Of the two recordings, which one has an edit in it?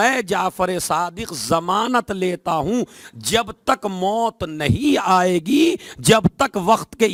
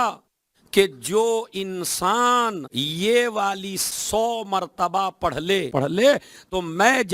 second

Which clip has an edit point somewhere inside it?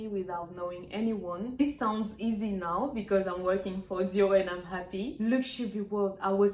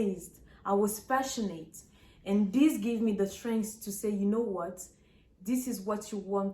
first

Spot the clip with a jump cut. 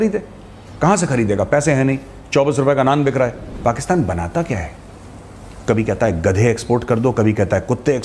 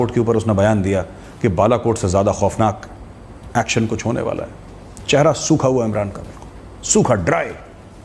first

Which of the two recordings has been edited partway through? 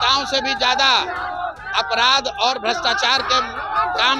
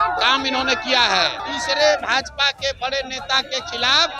second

